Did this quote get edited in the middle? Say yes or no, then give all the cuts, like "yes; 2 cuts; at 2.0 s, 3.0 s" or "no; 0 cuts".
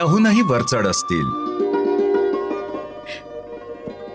yes; 1 cut; at 2.7 s